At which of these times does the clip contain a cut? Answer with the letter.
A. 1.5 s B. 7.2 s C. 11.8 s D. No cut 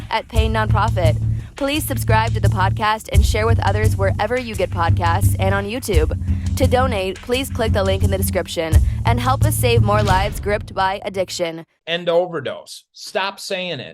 C